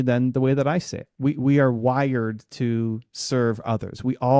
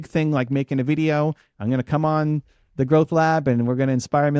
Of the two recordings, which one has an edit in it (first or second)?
first